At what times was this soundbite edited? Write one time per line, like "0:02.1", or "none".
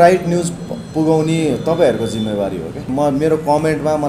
0:02.9